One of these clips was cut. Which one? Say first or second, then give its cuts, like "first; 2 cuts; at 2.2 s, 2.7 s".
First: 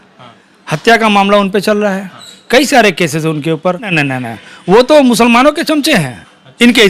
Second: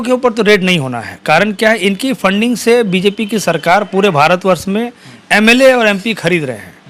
first; 1 cut; at 3.9 s